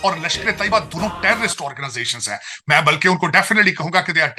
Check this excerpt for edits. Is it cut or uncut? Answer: uncut